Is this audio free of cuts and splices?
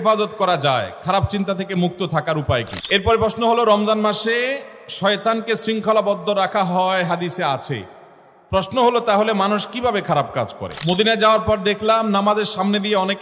no; 2 cuts; at 2.8 s, 10.7 s

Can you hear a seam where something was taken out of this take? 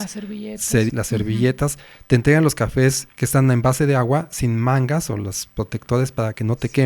yes; 2 cuts; at 0.9 s, 3.1 s

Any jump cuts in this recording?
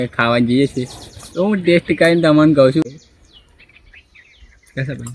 yes; 1 cut; at 2.8 s

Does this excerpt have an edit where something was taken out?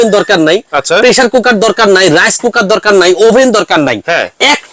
no; 0 cuts

